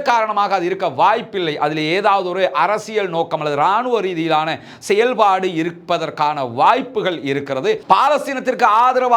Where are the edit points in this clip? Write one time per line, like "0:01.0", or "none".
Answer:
0:07.8